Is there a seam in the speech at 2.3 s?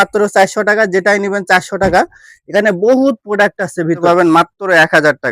no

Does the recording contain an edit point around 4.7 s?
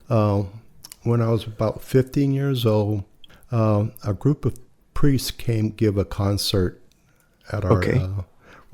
no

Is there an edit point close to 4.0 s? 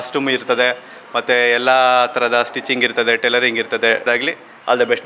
yes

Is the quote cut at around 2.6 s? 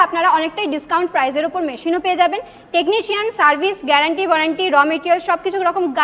no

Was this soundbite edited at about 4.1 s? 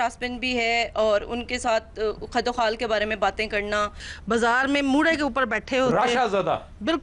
yes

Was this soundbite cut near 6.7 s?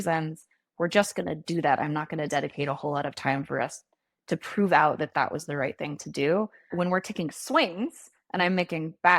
yes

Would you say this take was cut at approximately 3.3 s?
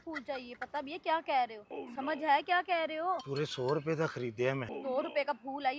yes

